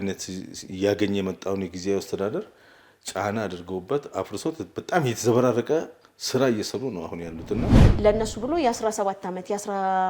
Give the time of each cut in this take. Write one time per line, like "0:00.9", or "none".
0:07.8